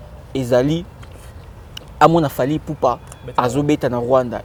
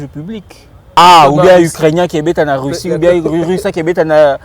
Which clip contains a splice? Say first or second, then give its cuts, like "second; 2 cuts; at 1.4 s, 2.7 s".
second; 1 cut; at 1.0 s